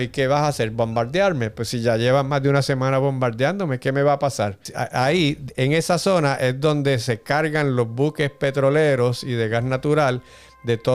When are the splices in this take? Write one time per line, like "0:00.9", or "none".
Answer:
0:04.7